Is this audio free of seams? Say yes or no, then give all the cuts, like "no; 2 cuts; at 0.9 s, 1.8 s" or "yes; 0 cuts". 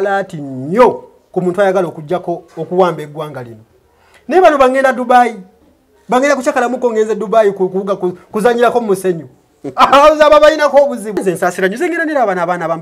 no; 1 cut; at 11.2 s